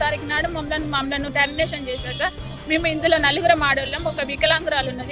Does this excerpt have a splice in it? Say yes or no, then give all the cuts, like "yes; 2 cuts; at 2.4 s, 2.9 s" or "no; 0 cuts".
no; 0 cuts